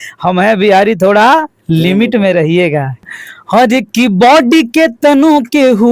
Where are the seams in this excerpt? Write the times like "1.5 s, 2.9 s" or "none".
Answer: 3.1 s